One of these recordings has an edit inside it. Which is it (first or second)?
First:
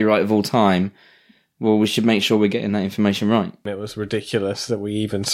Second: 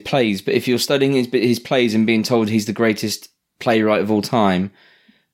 first